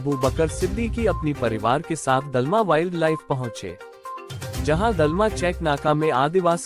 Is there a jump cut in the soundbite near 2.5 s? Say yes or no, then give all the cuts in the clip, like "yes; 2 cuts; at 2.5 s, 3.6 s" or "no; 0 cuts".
no; 0 cuts